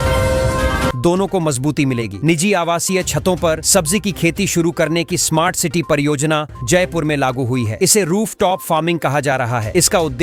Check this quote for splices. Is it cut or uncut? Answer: uncut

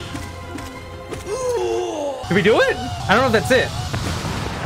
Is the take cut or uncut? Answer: cut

